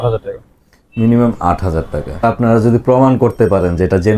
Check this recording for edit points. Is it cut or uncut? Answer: cut